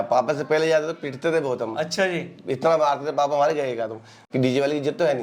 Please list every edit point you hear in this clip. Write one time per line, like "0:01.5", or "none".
0:04.1